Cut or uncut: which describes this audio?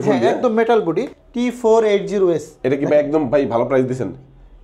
cut